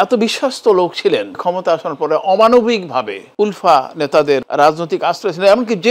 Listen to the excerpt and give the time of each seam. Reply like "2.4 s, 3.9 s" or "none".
1.3 s, 3.2 s, 4.4 s